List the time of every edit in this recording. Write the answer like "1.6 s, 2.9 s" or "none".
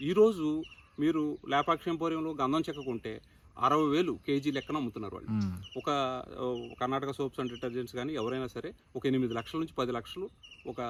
none